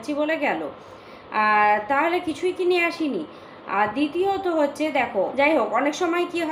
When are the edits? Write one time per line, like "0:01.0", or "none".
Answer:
0:05.3